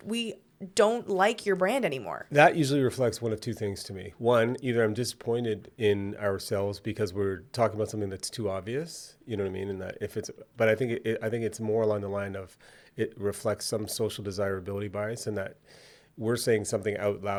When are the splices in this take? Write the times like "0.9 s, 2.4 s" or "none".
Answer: none

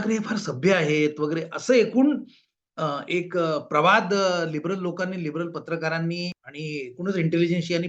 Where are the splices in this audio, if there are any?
6.5 s

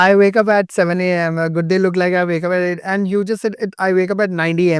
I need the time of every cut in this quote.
none

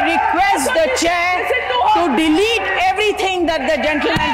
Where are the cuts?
none

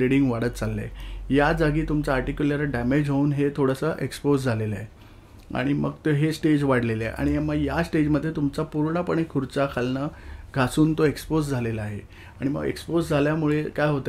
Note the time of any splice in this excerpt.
none

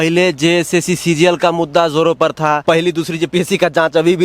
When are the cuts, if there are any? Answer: 2.6 s

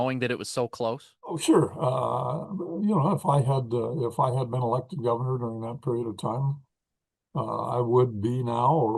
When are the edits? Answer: 1.4 s

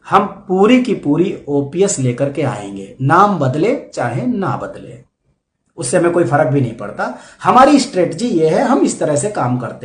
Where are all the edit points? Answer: none

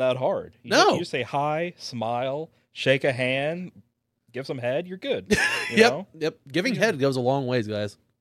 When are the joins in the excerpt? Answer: none

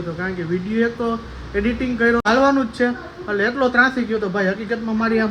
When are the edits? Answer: 2.2 s

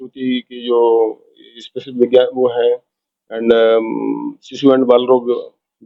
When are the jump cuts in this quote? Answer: none

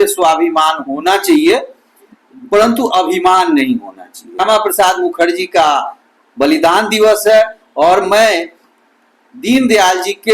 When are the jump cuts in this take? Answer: 4.4 s

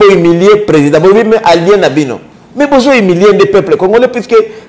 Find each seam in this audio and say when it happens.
none

